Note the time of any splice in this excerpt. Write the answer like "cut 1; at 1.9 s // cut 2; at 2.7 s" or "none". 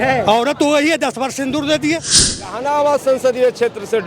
cut 1; at 2.5 s